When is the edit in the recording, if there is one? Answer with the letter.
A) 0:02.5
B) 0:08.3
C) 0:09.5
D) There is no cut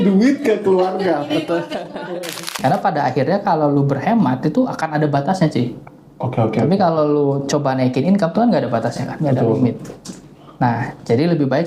A